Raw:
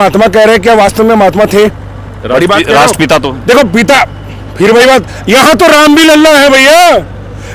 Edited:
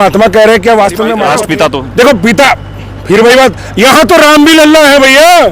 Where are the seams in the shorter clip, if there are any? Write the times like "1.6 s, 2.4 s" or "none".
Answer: 1.2 s